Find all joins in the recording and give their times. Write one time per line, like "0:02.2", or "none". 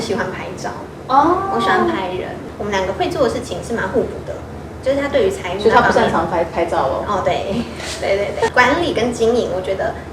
none